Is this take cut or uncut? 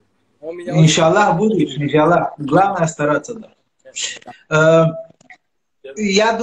uncut